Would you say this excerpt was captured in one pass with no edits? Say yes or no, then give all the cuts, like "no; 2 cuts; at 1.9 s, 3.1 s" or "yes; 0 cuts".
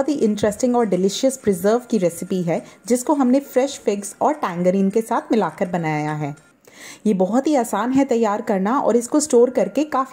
yes; 0 cuts